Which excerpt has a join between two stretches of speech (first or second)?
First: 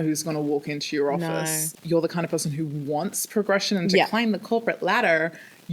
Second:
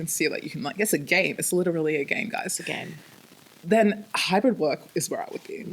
first